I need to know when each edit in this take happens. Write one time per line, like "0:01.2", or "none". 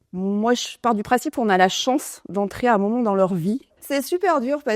0:03.7